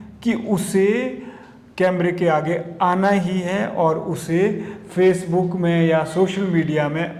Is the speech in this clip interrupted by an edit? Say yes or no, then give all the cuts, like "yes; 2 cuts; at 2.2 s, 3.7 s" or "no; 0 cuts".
no; 0 cuts